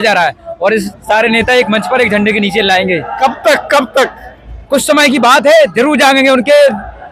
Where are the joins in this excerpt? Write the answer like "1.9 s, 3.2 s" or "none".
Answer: 0.9 s